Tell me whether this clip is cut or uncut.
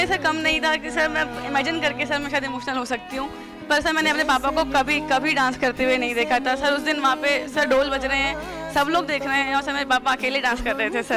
uncut